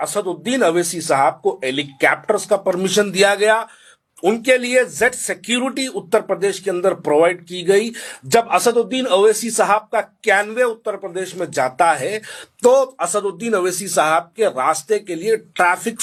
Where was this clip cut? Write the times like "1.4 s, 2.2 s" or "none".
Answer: none